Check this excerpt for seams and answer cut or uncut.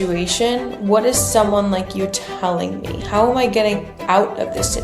uncut